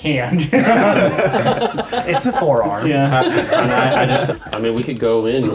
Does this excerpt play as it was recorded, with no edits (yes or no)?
no